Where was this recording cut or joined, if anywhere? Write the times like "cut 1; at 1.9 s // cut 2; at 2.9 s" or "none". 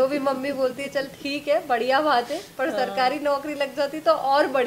none